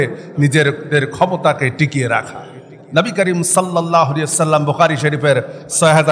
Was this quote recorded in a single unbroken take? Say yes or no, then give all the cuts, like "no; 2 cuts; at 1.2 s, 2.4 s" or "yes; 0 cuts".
no; 1 cut; at 2.8 s